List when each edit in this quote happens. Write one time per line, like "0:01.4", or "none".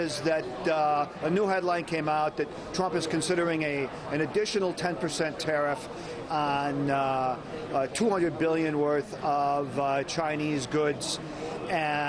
0:08.6